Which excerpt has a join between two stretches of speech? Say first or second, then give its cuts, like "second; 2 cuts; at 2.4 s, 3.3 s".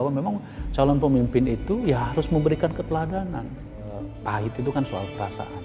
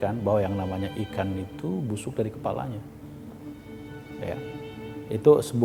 first; 1 cut; at 4.1 s